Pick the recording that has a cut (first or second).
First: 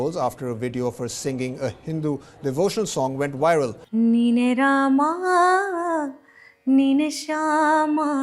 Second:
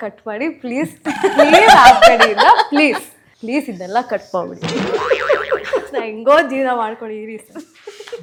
first